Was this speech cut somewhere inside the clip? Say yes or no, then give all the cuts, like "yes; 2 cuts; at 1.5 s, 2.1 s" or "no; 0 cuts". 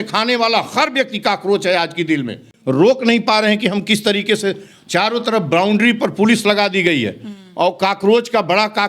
yes; 1 cut; at 2.5 s